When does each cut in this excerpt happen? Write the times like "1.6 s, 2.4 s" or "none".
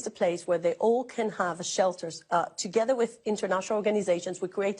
none